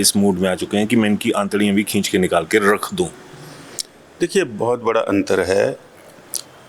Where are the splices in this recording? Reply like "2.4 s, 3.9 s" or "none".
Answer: none